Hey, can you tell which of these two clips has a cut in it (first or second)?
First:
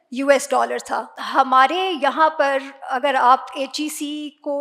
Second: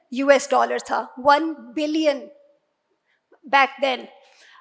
first